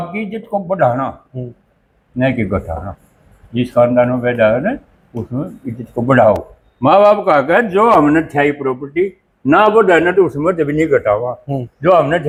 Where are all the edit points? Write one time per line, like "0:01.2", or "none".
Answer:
none